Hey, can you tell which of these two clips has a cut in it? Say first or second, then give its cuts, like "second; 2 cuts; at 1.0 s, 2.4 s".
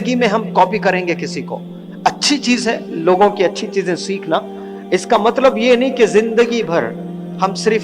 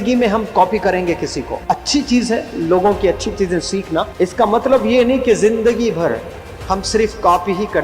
second; 2 cuts; at 1.5 s, 4.1 s